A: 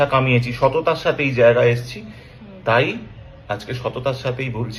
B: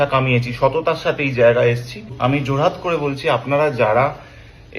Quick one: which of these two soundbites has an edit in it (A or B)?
B